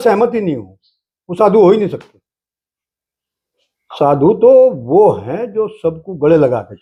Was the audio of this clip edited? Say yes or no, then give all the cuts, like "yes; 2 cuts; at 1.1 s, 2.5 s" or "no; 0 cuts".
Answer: no; 0 cuts